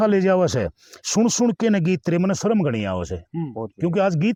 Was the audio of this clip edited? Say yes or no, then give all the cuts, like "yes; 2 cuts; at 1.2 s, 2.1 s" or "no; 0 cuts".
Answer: no; 0 cuts